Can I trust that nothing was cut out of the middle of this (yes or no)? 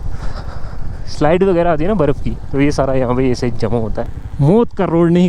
no